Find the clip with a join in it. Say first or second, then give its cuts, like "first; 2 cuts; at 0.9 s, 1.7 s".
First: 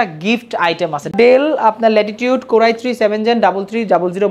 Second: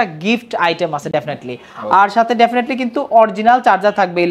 first; 1 cut; at 1.1 s